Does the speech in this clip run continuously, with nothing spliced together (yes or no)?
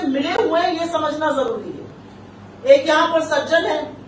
yes